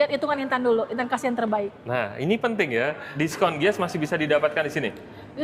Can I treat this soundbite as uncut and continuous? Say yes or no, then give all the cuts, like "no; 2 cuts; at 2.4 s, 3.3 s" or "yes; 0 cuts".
no; 1 cut; at 3.0 s